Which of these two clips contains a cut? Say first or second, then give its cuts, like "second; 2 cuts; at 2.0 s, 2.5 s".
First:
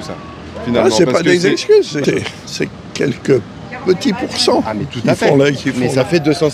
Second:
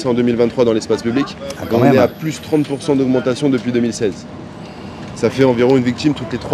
first; 1 cut; at 2.0 s